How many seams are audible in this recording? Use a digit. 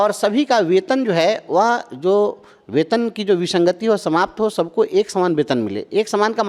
0